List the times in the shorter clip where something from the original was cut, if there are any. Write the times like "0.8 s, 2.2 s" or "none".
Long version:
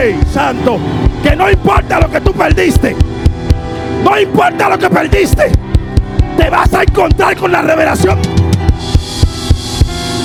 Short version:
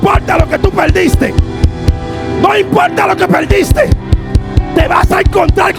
none